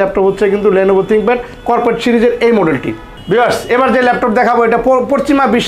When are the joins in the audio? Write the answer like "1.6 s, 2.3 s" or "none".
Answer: none